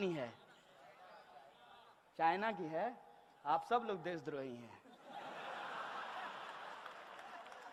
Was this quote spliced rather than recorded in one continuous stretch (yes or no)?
no